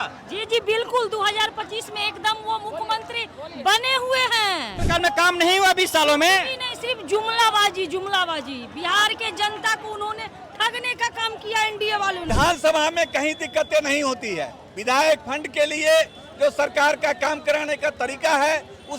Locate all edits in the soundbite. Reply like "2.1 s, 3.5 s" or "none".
4.8 s, 12.3 s